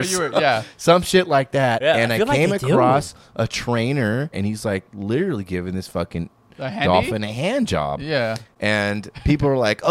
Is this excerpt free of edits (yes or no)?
no